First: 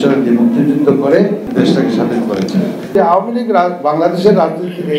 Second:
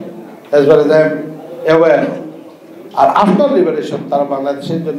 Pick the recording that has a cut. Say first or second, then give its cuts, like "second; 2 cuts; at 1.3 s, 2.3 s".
first; 2 cuts; at 1.4 s, 2.9 s